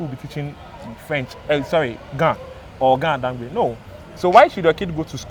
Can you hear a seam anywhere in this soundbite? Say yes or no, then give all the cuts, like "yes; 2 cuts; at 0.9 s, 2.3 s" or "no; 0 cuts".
no; 0 cuts